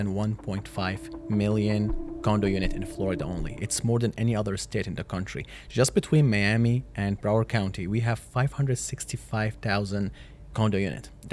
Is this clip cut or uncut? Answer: uncut